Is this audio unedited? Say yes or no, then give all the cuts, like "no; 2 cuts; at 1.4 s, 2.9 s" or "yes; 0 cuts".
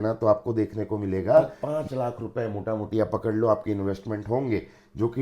no; 1 cut; at 1.6 s